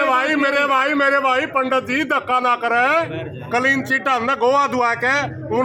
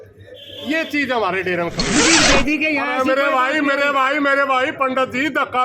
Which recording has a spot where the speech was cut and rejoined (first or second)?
second